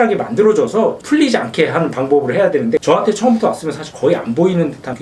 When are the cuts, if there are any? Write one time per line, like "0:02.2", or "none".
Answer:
0:02.8